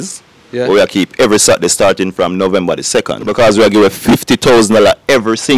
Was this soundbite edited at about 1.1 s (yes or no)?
no